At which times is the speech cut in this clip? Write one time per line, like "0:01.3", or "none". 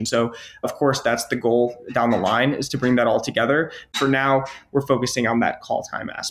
0:03.8